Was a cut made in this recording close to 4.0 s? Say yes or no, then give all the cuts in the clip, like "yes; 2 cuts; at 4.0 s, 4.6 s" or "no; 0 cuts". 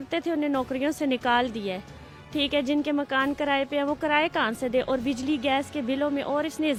no; 0 cuts